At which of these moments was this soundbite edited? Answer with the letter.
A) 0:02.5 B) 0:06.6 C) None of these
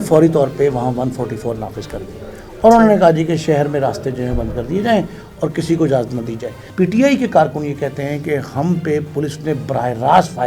B